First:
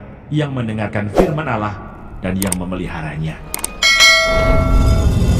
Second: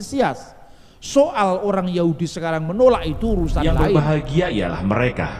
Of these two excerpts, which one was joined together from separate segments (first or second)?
second